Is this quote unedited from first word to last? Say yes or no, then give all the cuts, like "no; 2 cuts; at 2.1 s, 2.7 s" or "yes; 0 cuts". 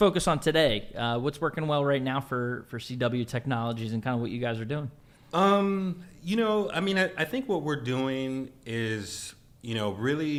yes; 0 cuts